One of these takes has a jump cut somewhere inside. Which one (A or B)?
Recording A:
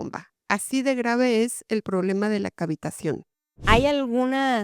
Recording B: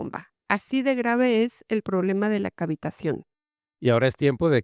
A